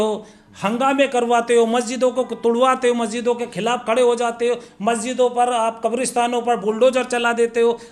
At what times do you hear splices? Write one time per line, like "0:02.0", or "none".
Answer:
none